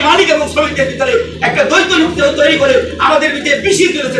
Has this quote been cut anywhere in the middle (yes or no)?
no